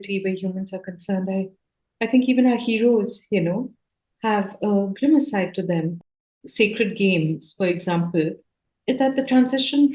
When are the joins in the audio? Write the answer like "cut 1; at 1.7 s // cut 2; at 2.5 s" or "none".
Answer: cut 1; at 6.0 s

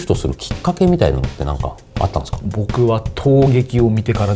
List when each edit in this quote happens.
cut 1; at 2.3 s

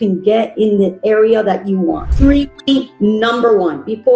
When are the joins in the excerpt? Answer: cut 1; at 2.1 s

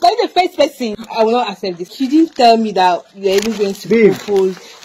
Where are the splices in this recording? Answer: cut 1; at 1.0 s // cut 2; at 1.9 s

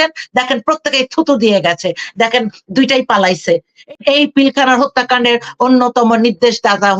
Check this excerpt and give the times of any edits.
cut 1; at 3.7 s

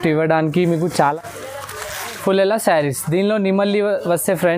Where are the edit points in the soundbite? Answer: cut 1; at 0.9 s

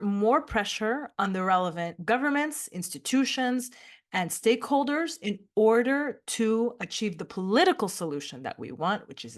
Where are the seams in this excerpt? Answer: none

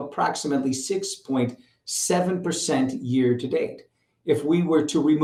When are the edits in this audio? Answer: none

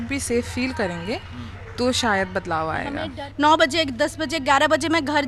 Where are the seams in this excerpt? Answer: cut 1; at 3.2 s

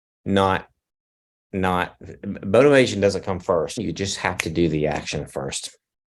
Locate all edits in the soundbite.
cut 1; at 3.8 s

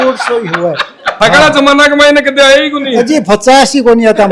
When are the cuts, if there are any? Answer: cut 1; at 1.1 s

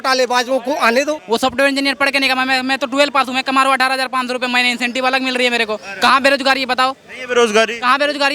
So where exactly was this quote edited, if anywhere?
cut 1; at 1.2 s

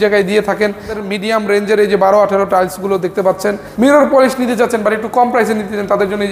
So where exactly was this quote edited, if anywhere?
cut 1; at 0.9 s // cut 2; at 3.6 s

